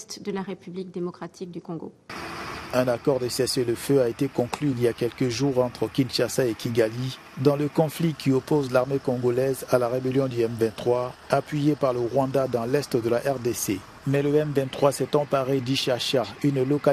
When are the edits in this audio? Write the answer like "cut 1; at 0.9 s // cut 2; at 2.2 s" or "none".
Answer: none

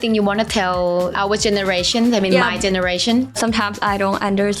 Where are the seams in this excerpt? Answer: cut 1; at 1.1 s // cut 2; at 3.4 s

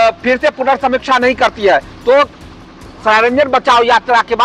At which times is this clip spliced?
none

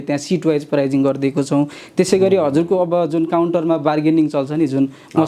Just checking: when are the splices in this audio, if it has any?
none

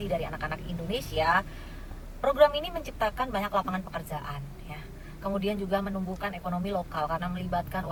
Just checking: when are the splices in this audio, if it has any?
none

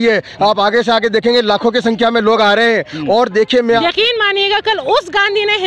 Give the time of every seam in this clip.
cut 1; at 3.8 s

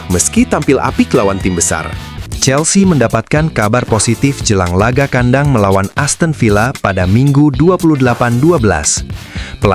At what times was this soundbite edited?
cut 1; at 2.2 s

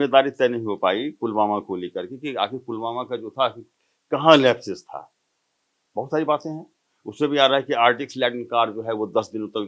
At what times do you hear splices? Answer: none

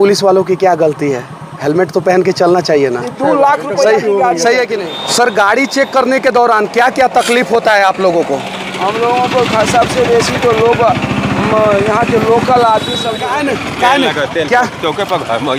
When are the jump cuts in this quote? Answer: cut 1; at 4.9 s // cut 2; at 13.2 s

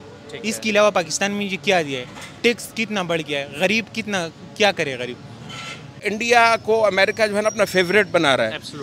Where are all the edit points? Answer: cut 1; at 6.0 s

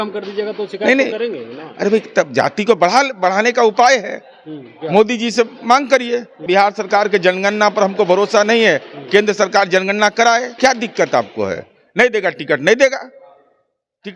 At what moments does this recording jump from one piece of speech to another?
cut 1; at 6.4 s // cut 2; at 10.5 s

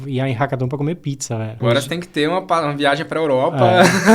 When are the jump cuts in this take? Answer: cut 1; at 1.5 s

